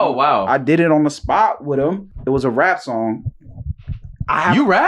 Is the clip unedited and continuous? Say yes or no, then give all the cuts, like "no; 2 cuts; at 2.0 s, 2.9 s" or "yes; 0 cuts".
no; 1 cut; at 2.1 s